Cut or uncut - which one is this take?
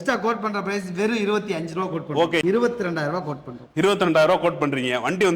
cut